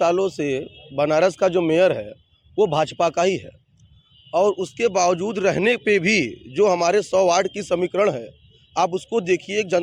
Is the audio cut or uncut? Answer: uncut